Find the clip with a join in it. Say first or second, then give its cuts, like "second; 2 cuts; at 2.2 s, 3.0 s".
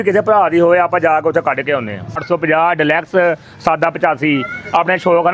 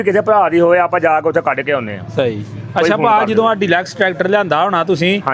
first; 1 cut; at 2.2 s